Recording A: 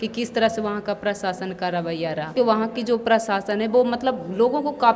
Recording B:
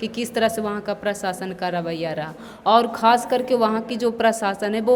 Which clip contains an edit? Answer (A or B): A